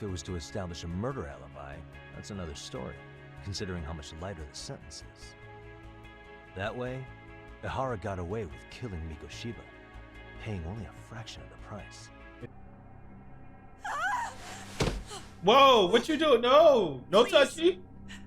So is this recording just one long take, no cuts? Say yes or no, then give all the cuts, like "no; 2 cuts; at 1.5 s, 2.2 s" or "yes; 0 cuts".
no; 1 cut; at 12.5 s